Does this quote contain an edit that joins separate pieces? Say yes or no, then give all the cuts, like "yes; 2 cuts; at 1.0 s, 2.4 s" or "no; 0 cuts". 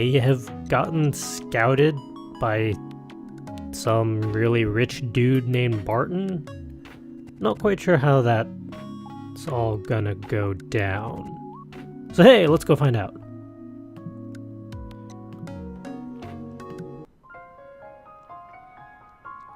yes; 1 cut; at 4.3 s